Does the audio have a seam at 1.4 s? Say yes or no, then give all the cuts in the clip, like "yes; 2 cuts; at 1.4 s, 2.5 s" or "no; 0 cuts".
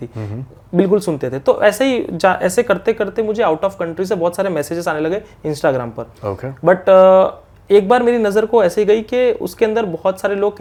no; 0 cuts